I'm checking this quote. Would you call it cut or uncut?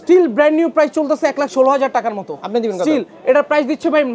uncut